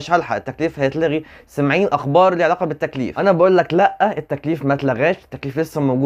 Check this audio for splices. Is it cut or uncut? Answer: uncut